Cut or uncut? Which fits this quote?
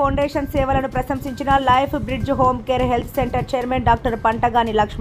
uncut